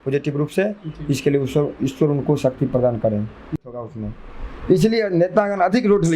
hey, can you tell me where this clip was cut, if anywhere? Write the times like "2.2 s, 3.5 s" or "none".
3.6 s